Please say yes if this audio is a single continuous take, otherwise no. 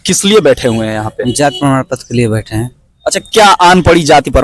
yes